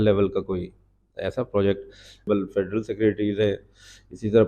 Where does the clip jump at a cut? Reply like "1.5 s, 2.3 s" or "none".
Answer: 2.3 s